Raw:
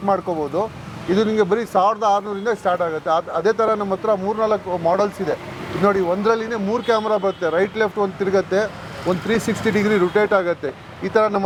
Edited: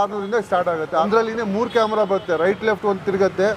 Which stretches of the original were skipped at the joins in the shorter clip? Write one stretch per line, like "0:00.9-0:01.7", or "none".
0:03.2-0:06.2